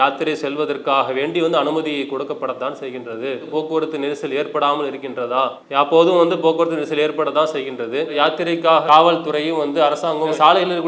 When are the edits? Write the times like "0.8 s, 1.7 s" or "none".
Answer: 3.5 s, 5.6 s, 8.2 s